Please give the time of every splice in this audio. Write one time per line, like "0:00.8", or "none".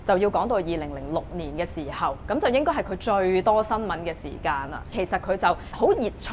0:05.0